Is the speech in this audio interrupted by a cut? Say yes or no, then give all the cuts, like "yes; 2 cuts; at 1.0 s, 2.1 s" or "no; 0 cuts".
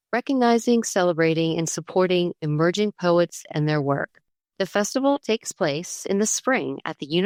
no; 0 cuts